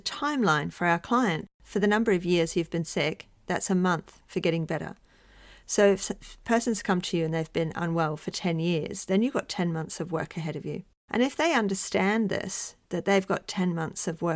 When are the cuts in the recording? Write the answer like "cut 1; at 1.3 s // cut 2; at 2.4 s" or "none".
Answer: cut 1; at 1.4 s // cut 2; at 10.9 s